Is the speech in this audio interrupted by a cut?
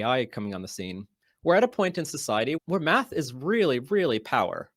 no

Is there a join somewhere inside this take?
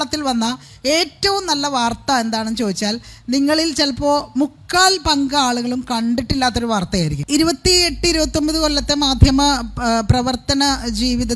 yes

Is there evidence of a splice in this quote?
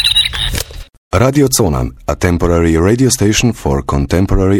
yes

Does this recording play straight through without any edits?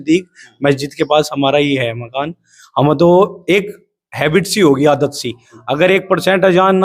yes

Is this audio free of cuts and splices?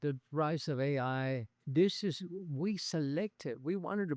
no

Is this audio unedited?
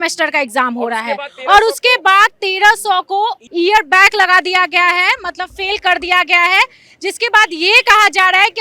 yes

